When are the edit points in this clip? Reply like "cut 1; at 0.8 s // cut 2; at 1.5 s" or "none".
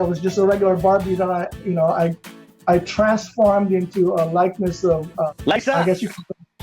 cut 1; at 5.3 s